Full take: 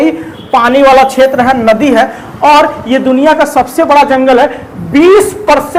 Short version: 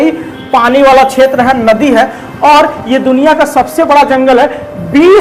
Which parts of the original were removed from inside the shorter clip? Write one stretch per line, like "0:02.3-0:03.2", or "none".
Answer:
none